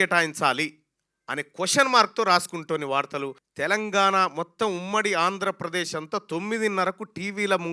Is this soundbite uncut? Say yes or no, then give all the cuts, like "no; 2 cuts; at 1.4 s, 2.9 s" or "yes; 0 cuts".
no; 1 cut; at 3.4 s